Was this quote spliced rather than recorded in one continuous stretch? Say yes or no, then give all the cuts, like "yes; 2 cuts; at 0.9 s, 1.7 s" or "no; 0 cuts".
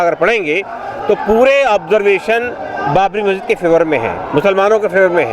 no; 0 cuts